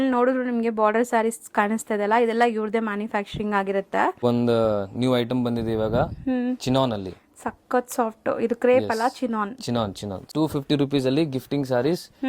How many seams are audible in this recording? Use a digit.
2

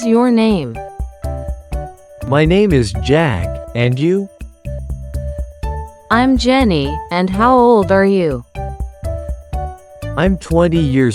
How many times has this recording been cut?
4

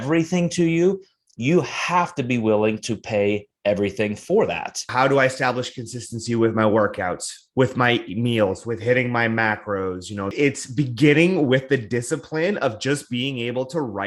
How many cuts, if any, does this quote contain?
2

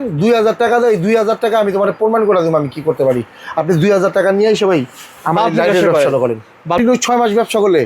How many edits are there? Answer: 1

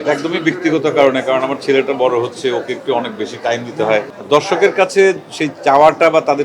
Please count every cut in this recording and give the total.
1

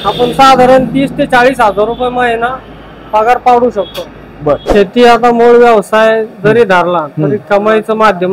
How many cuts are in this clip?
1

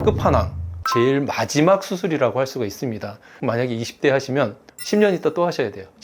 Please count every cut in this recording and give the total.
1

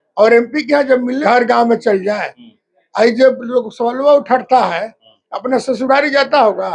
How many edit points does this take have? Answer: 1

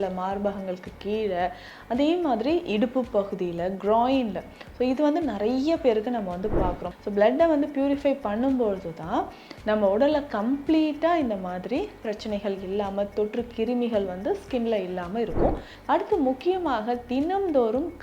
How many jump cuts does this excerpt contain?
2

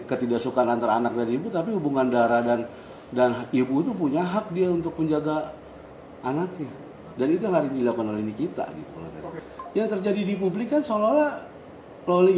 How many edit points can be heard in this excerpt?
1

